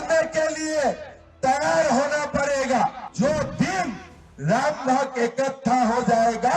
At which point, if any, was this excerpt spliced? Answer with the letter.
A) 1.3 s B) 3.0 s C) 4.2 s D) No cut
B